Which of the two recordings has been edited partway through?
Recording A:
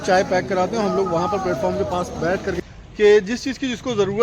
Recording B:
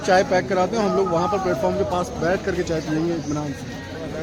A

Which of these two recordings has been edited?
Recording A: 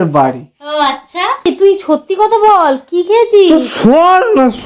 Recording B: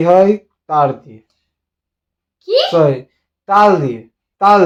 A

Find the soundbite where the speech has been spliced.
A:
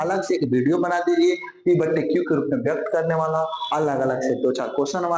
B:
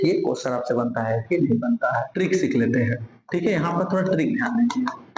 B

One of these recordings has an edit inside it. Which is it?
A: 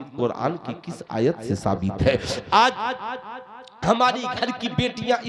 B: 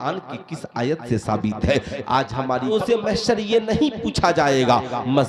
B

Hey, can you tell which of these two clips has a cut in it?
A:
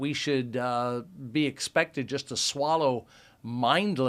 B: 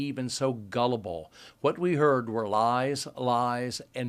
B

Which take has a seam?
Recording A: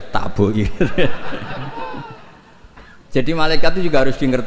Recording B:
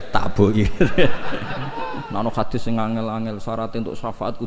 B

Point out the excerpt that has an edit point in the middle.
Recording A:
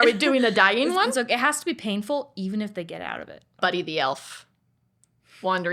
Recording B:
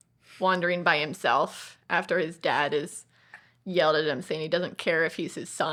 A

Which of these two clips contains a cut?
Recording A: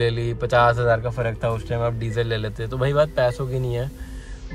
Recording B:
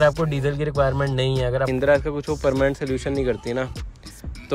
B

